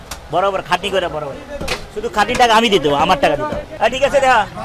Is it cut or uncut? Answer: cut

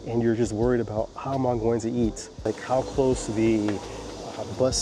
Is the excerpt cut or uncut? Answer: cut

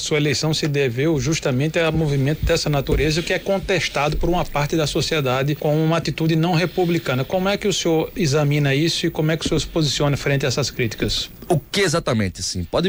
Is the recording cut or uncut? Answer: uncut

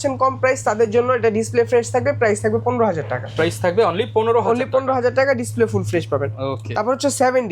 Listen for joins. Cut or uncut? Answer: uncut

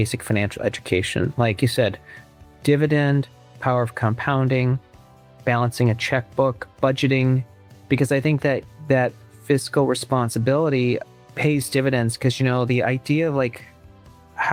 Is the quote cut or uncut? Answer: uncut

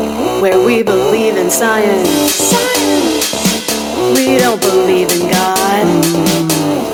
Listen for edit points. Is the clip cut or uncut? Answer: uncut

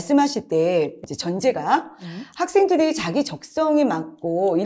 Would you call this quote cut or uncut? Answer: cut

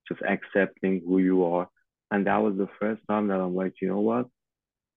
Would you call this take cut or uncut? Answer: cut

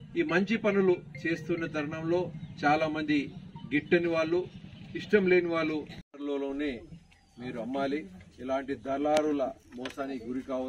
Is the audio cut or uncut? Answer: cut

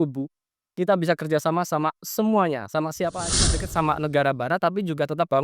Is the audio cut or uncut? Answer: cut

